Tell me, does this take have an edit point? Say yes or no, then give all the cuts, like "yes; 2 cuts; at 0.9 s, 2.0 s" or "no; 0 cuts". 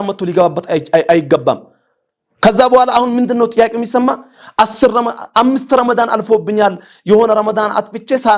no; 0 cuts